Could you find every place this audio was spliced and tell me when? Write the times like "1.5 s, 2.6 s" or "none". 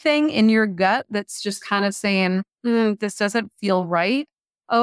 none